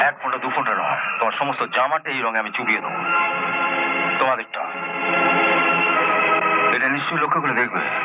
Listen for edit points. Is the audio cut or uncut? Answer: uncut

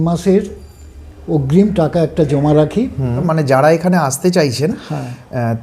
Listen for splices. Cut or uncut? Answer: cut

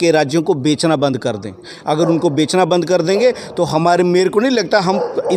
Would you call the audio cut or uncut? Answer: uncut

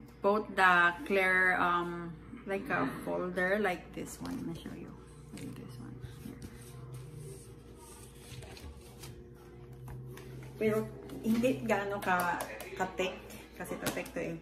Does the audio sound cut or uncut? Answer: cut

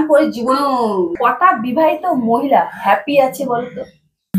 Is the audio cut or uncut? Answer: cut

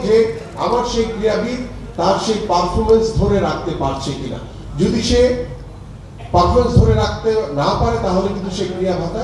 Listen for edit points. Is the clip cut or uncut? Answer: uncut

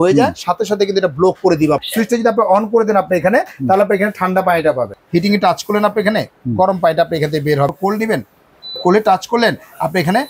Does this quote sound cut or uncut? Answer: cut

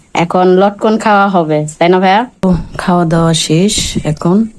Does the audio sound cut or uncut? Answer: cut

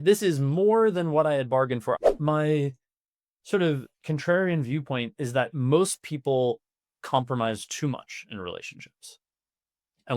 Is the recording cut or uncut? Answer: cut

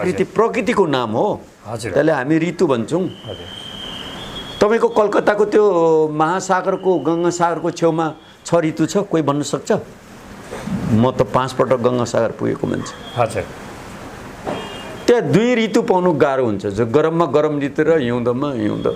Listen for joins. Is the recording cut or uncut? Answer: uncut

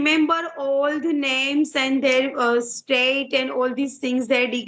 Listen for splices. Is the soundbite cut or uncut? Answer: uncut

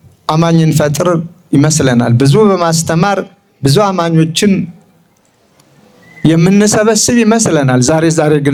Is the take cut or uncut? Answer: uncut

